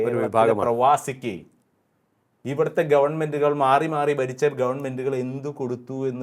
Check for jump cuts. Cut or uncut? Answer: uncut